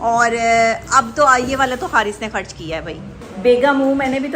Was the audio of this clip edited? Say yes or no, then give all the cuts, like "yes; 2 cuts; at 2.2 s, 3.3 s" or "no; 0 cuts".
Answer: yes; 1 cut; at 3.2 s